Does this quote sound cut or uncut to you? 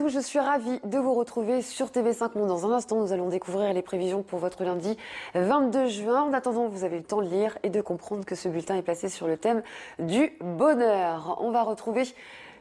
uncut